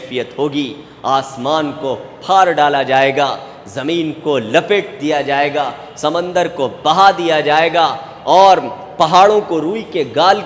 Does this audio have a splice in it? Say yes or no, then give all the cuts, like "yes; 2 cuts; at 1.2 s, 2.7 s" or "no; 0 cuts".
no; 0 cuts